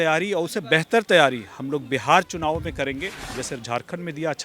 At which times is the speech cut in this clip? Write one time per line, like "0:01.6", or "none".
0:03.4